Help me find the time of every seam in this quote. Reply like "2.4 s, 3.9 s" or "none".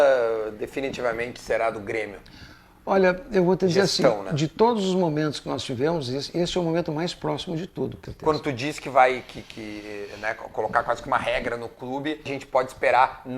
8.0 s, 12.3 s